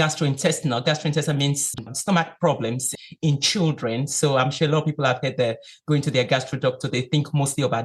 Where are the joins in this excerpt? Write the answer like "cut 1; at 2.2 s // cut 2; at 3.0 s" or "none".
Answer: cut 1; at 1.8 s // cut 2; at 2.9 s